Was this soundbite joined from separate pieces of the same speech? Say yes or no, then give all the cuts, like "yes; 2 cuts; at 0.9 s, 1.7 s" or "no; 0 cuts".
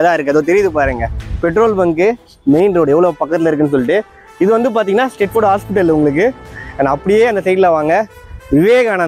no; 0 cuts